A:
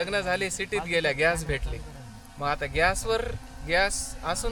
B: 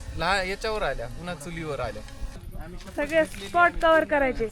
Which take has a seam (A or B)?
B